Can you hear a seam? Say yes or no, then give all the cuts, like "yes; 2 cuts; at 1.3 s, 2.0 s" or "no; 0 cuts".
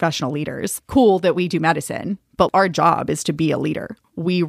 no; 0 cuts